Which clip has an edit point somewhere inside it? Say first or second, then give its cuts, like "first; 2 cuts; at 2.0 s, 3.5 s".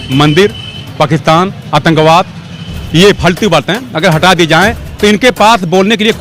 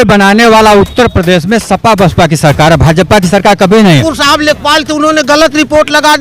second; 1 cut; at 4.0 s